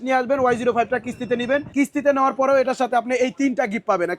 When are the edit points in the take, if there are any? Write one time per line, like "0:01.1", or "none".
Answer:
0:01.7

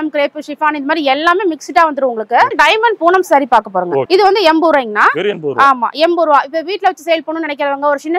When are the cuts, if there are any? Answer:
0:02.5
0:04.1

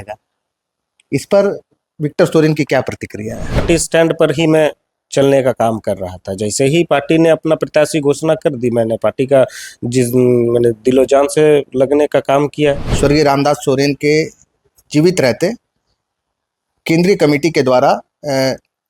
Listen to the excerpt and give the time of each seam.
0:03.6
0:12.9

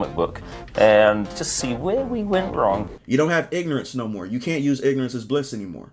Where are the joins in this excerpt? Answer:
0:02.9

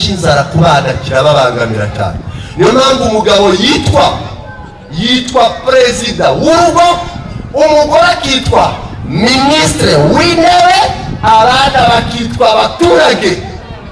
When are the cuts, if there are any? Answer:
none

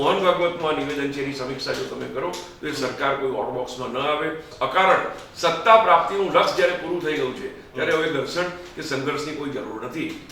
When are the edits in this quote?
0:04.5

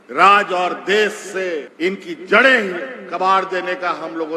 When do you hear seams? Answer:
0:01.7

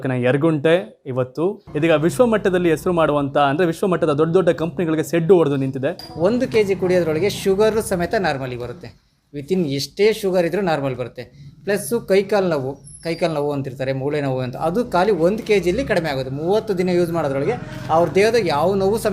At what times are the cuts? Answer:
0:01.6
0:06.0

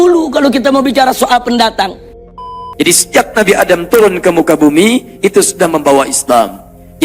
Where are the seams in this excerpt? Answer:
0:02.6

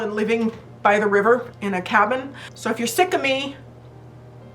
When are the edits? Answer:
0:02.4

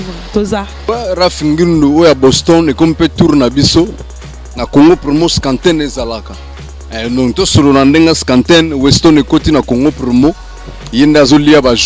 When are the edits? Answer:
none

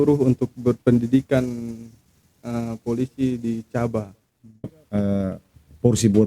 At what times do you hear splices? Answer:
0:04.7

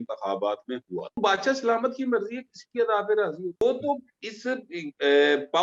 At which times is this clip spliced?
0:01.2
0:03.6

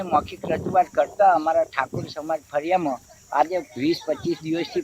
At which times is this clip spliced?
none

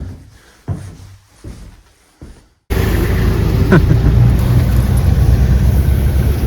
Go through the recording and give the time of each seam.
0:02.7

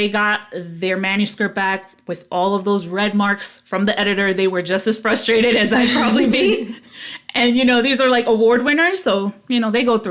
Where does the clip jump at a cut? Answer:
none

